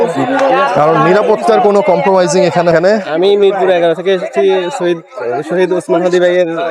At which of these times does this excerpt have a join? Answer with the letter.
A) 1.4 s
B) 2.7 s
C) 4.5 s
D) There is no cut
B